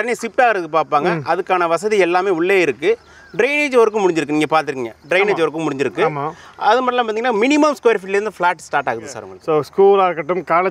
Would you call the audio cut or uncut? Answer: cut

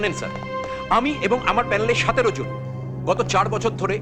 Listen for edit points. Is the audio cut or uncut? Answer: uncut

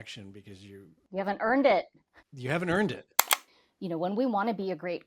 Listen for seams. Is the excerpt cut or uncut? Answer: cut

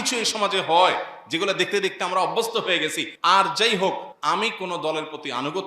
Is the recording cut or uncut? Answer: cut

